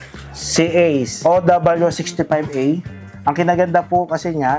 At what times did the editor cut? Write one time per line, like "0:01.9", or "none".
0:01.1

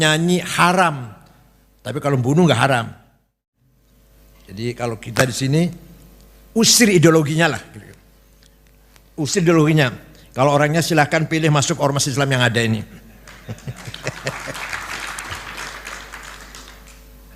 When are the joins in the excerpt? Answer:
0:03.8

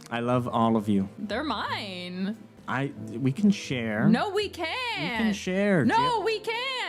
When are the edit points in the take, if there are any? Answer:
0:01.2

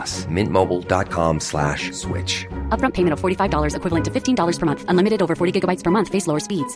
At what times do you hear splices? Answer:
none

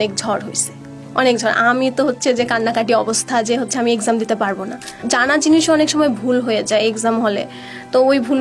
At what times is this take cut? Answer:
0:05.0

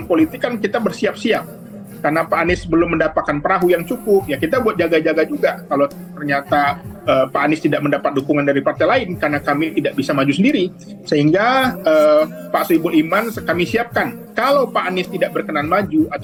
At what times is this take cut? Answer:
none

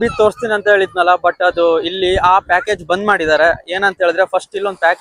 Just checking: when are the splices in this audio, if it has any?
none

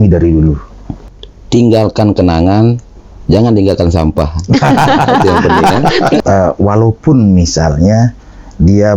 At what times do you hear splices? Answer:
0:01.0
0:06.2

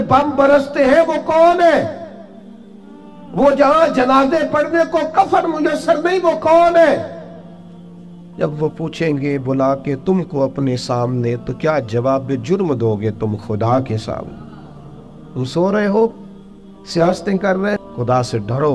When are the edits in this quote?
0:17.8

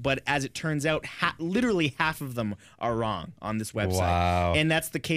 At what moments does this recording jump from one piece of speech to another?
none

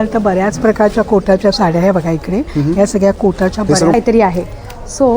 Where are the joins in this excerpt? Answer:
0:03.9

